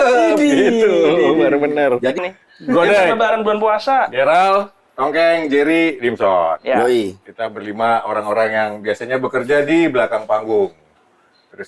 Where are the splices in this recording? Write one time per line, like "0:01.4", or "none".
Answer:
0:02.2